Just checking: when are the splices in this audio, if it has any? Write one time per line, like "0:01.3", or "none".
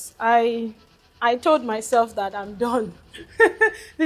none